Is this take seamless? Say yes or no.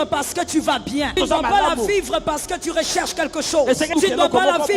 no